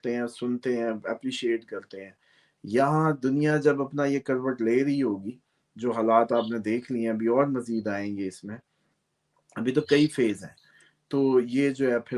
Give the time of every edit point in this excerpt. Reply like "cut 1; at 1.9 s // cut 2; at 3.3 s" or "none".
none